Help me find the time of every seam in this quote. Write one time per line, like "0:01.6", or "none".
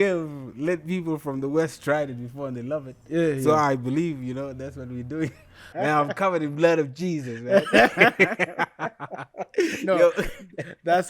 0:05.7